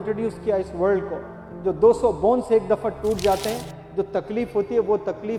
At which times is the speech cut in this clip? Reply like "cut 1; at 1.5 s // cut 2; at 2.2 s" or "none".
none